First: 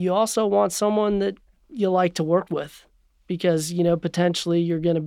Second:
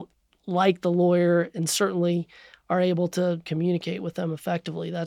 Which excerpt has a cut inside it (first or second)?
second